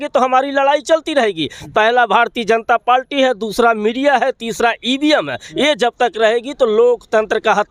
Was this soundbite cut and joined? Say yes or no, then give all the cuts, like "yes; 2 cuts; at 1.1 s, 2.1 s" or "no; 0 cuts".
no; 0 cuts